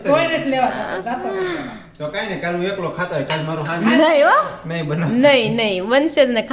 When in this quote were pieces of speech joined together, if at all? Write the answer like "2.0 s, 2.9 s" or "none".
none